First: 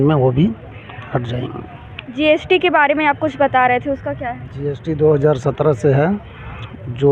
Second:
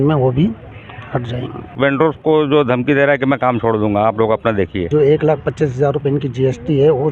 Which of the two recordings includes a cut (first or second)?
second